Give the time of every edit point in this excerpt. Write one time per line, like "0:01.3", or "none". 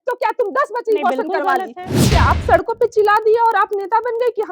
0:02.1

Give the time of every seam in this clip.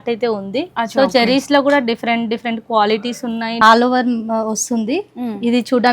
0:03.6

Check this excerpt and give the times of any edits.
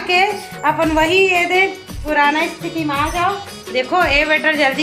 0:03.6

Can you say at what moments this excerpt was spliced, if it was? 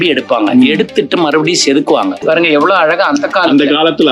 0:02.2

